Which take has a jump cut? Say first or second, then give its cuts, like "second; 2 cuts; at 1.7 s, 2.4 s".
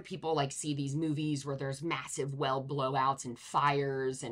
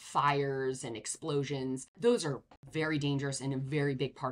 second; 2 cuts; at 1.9 s, 2.6 s